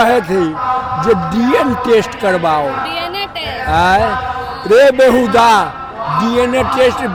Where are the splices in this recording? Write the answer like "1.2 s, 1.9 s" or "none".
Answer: none